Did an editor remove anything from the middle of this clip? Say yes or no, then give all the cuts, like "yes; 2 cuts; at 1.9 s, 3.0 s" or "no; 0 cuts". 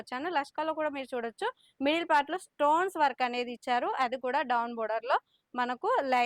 no; 0 cuts